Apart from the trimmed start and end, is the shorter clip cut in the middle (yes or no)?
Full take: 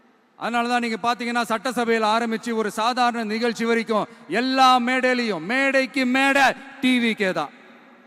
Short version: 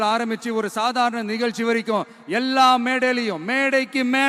no